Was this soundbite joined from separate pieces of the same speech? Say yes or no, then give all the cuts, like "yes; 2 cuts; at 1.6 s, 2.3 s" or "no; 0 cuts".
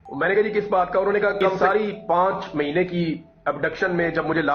yes; 1 cut; at 1.5 s